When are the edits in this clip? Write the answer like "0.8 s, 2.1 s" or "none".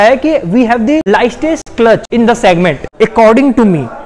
1.1 s, 2.1 s, 2.8 s